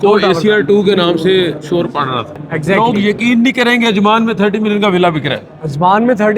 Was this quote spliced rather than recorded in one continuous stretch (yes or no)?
yes